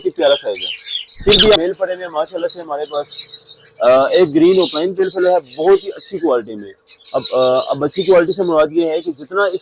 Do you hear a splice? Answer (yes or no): yes